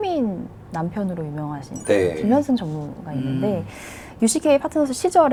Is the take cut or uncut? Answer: uncut